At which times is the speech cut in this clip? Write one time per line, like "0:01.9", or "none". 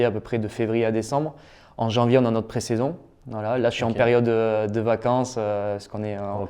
none